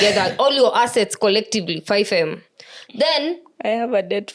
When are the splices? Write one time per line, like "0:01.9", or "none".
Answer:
none